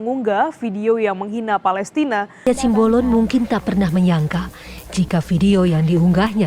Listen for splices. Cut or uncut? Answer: cut